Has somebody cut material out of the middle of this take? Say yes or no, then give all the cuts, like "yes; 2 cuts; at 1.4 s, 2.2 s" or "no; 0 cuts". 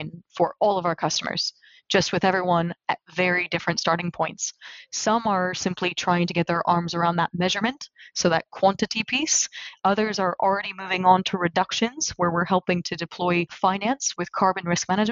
yes; 1 cut; at 13.8 s